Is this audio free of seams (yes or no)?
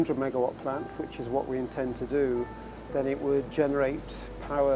yes